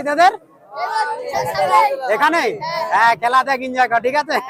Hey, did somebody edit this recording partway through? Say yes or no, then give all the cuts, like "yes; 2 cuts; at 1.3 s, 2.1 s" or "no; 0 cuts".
no; 0 cuts